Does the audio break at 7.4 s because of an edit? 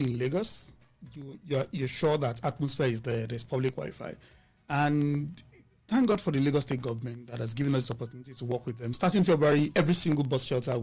no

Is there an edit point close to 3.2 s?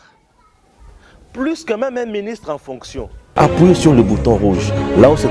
yes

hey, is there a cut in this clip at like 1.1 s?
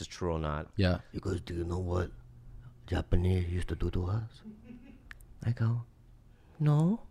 yes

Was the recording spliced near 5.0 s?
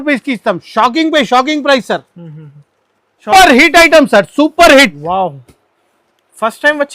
no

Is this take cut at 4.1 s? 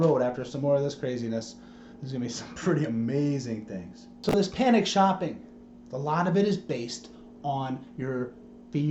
yes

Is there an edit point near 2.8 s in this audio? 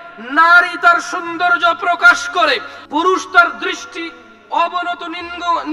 yes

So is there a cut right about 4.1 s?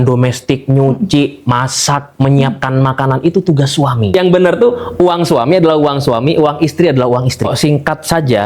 yes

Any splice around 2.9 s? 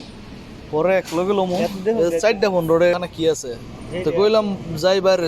yes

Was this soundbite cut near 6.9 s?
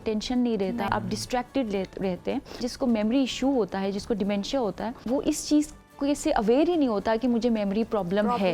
no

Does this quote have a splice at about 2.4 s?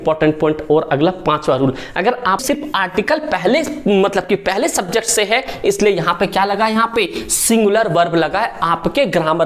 yes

